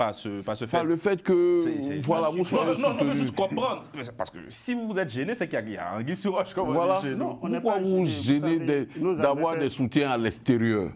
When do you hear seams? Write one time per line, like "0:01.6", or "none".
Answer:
none

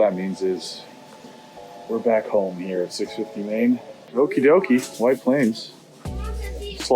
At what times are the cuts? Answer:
0:04.0

